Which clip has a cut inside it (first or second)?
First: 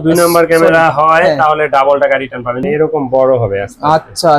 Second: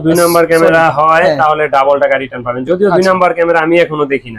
first